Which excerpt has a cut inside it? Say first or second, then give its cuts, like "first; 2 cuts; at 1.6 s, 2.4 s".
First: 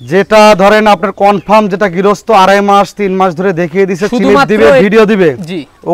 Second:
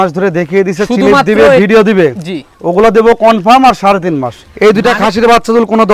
second; 1 cut; at 4.4 s